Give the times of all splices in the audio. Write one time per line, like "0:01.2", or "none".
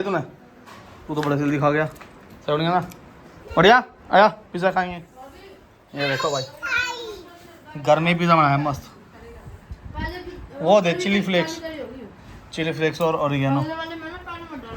none